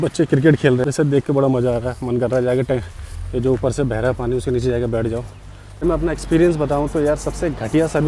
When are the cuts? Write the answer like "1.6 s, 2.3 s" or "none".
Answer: 0.8 s, 5.8 s